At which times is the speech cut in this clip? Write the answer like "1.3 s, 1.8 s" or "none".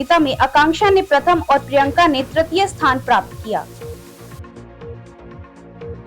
3.7 s